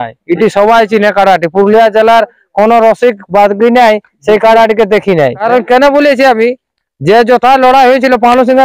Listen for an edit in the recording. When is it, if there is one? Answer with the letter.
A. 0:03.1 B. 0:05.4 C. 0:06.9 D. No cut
B